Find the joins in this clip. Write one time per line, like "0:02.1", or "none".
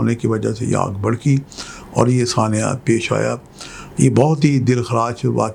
none